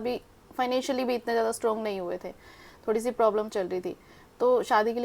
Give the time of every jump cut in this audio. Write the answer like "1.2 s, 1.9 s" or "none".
none